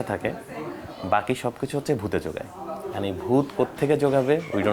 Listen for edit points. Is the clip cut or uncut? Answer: uncut